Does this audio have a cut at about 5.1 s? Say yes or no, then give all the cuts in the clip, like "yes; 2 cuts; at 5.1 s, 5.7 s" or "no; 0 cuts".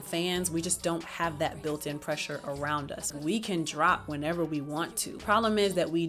yes; 2 cuts; at 3.2 s, 5.1 s